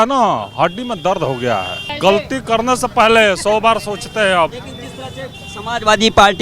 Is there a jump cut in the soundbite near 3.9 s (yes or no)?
no